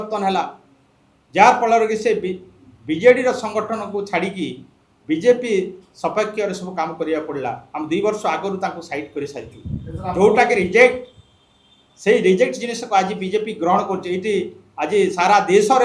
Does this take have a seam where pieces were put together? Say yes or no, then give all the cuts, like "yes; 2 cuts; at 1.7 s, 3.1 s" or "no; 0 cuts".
no; 0 cuts